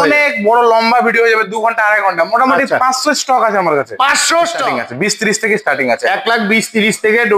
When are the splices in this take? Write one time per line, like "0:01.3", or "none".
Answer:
0:04.8